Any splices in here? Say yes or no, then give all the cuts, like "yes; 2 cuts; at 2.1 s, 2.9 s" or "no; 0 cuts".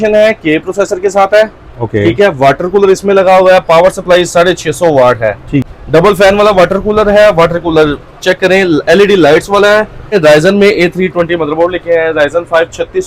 yes; 2 cuts; at 5.6 s, 10.1 s